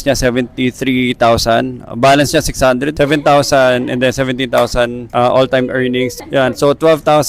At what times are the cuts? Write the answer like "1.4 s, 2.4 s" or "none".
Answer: 2.9 s, 6.1 s

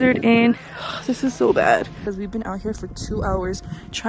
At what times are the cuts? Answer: 2.0 s

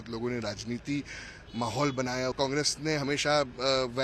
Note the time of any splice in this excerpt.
2.3 s

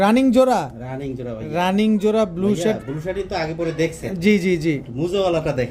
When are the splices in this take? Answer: none

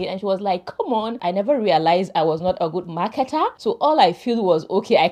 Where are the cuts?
1.2 s, 3.6 s

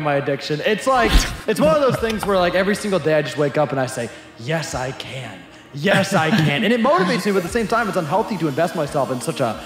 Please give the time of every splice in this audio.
none

